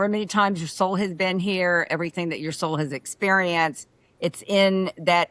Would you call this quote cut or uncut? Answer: uncut